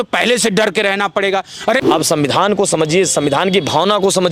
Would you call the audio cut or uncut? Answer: cut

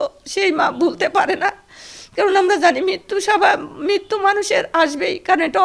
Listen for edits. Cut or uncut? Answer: uncut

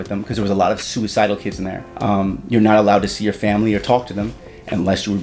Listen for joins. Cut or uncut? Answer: uncut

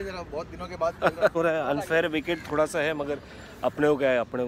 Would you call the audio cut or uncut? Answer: cut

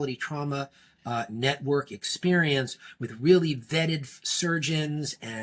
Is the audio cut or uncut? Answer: uncut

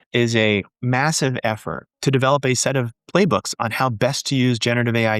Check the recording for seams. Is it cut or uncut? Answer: cut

